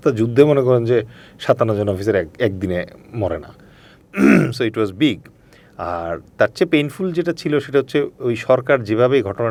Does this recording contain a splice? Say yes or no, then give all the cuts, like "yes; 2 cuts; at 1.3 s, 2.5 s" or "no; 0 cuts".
no; 0 cuts